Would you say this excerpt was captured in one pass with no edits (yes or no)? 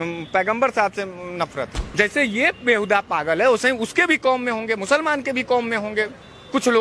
no